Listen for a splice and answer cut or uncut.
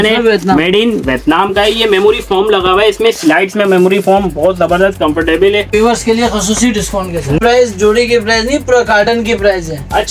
cut